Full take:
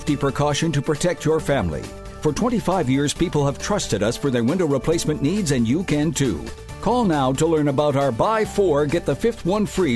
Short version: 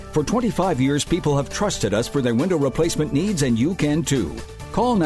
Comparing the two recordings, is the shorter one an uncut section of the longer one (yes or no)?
yes